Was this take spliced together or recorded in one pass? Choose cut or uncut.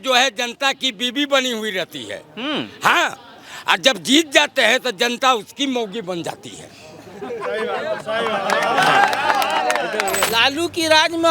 cut